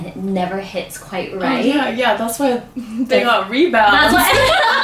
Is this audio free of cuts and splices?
yes; 0 cuts

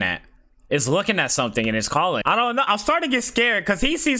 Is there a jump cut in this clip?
yes; 1 cut; at 2.2 s

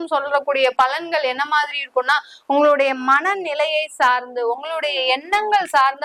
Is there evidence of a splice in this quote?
no; 0 cuts

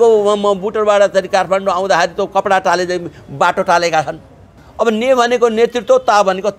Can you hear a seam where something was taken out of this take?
yes; 1 cut; at 4.6 s

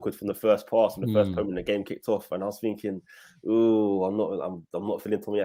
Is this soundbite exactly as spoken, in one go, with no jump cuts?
yes; 0 cuts

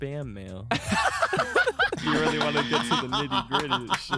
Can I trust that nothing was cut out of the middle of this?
yes; 0 cuts

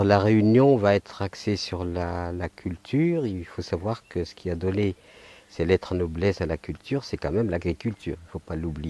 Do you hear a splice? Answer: yes; 1 cut; at 6.7 s

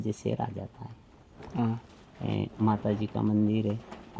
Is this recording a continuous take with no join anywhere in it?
yes; 0 cuts

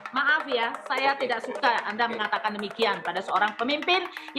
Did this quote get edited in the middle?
no; 0 cuts

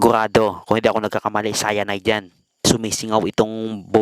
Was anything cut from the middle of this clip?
yes; 1 cut; at 2.6 s

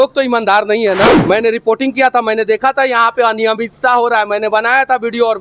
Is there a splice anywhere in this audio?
yes; 1 cut; at 1.2 s

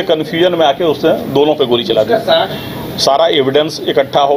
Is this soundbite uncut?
no; 1 cut; at 2.5 s

